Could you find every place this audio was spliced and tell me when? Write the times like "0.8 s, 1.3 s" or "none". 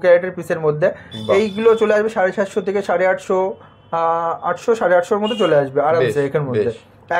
none

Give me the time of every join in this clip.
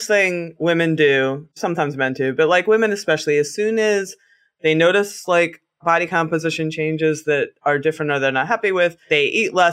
1.6 s

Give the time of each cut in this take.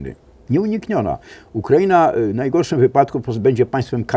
none

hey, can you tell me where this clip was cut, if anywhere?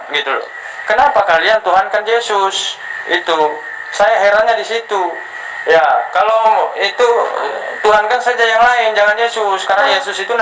none

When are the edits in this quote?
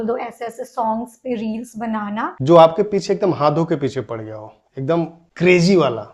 2.3 s

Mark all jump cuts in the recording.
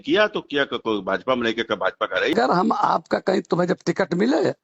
2.3 s

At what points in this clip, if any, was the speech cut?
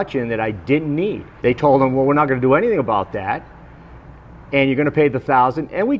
1.3 s

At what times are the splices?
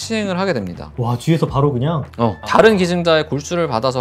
none

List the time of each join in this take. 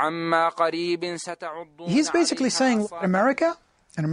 1.4 s

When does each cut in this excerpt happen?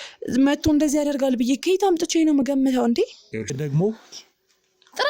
3.6 s

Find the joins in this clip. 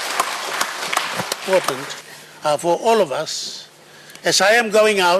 1.4 s

